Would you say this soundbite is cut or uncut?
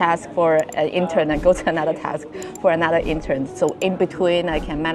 uncut